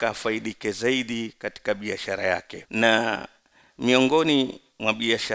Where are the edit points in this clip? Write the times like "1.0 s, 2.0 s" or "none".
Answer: 2.6 s